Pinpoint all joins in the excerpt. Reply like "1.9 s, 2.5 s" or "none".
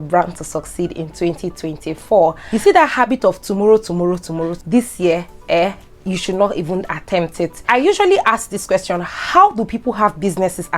2.4 s, 4.6 s, 7.6 s